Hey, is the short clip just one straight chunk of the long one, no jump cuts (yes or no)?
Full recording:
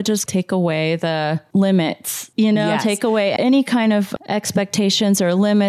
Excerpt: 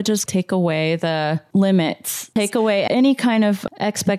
no